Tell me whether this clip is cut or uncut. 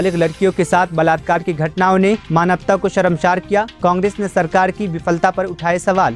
uncut